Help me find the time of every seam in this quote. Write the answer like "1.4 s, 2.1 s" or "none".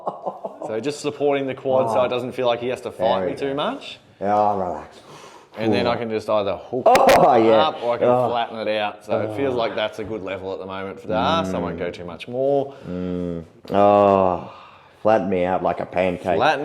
13.5 s